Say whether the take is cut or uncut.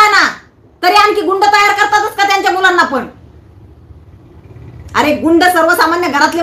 uncut